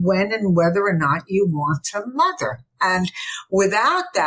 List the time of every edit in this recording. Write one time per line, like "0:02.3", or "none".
none